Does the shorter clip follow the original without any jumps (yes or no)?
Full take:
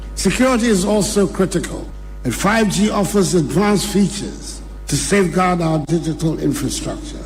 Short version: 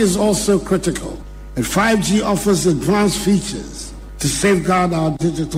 yes